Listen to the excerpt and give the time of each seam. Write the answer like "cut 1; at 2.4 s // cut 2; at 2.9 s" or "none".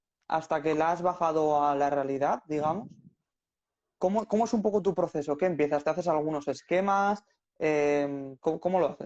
none